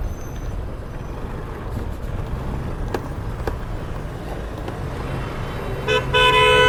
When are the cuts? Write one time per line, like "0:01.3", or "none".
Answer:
none